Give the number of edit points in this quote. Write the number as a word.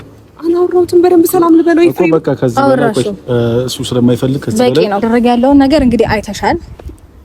one